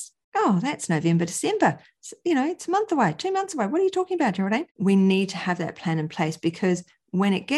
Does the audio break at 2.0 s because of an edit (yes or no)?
no